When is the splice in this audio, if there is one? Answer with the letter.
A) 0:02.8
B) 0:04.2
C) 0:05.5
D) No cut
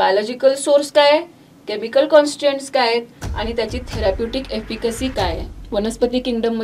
C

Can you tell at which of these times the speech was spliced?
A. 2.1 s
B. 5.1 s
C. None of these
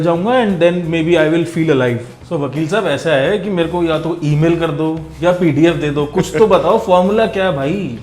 A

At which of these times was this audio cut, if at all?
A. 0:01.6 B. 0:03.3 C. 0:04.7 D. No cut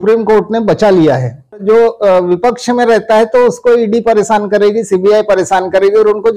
A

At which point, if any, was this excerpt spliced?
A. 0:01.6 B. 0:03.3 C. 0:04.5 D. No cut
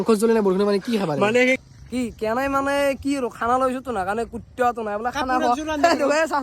A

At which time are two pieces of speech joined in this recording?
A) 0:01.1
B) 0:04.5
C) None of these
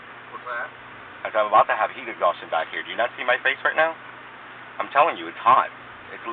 C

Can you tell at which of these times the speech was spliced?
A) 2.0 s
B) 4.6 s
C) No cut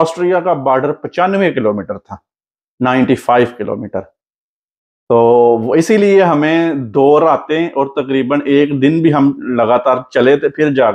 C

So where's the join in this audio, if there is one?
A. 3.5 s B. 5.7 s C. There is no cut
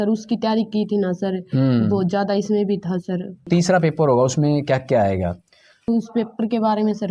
A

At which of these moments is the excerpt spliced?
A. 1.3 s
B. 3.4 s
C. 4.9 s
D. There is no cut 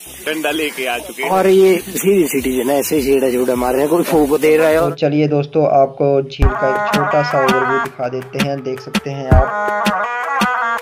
C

